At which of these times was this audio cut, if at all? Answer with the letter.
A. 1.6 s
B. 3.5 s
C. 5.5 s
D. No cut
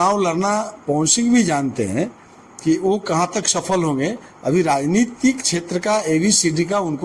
D